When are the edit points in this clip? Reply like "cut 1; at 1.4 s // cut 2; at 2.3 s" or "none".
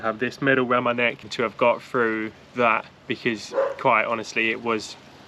cut 1; at 1.2 s